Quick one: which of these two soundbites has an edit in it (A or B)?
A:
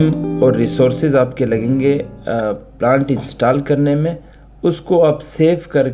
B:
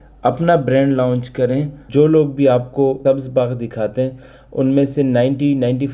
B